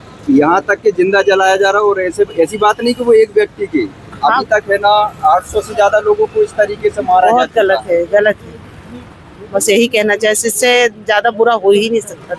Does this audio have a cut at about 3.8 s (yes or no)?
no